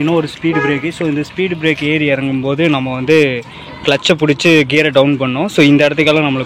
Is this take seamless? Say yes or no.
yes